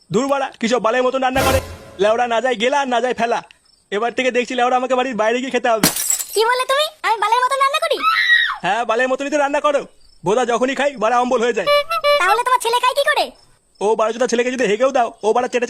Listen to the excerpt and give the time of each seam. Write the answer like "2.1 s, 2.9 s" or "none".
1.8 s